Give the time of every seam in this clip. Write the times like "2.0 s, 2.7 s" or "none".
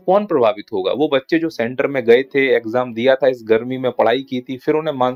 none